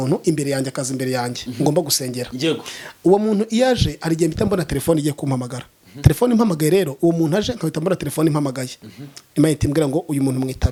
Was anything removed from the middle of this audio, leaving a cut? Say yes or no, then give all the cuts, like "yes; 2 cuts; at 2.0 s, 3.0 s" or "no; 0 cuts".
no; 0 cuts